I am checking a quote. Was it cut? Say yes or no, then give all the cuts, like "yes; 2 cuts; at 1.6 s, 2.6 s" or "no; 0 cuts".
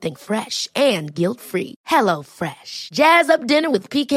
no; 0 cuts